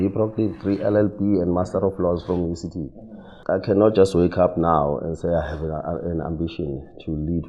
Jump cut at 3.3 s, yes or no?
yes